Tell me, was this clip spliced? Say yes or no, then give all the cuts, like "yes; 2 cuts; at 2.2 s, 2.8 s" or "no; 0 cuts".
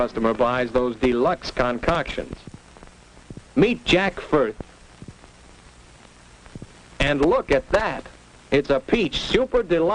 no; 0 cuts